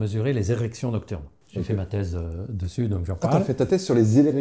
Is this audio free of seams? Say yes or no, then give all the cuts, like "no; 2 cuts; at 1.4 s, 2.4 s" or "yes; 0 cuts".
yes; 0 cuts